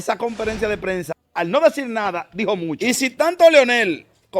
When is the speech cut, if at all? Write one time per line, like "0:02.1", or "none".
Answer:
0:01.1
0:02.8